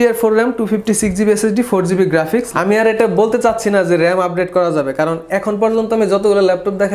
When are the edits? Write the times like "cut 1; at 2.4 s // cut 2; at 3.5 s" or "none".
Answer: cut 1; at 2.5 s